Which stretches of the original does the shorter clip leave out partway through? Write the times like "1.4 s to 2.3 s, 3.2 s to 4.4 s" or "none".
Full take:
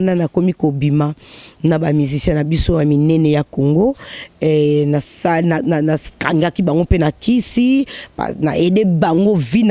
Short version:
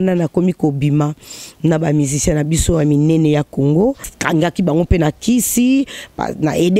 4.1 s to 6.1 s